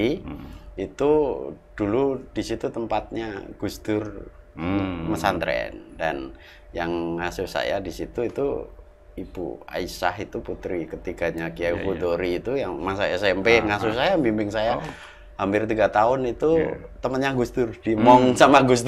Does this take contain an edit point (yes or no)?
no